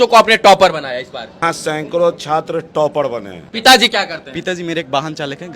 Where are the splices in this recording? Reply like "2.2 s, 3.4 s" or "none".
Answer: 1.4 s, 3.4 s